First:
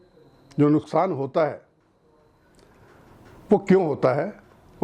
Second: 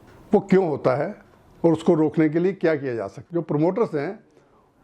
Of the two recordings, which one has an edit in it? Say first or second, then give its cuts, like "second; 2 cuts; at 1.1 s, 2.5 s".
second; 1 cut; at 3.2 s